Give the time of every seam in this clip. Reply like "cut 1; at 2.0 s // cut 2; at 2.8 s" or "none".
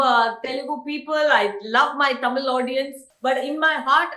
cut 1; at 3.1 s